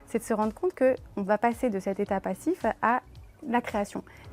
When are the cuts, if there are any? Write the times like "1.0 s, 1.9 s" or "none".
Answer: none